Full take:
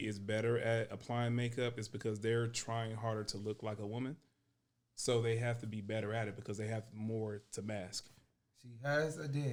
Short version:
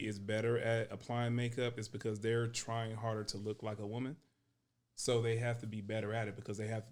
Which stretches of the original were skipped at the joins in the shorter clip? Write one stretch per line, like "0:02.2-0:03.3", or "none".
none